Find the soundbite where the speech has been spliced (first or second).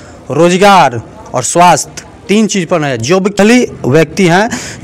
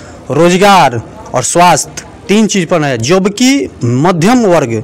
first